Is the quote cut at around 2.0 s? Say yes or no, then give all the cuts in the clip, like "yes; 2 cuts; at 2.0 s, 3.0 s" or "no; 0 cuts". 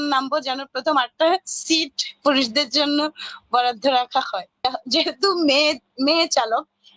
no; 1 cut; at 4.6 s